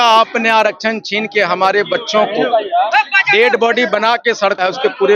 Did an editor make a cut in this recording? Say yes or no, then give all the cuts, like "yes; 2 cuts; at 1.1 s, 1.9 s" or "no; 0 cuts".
no; 0 cuts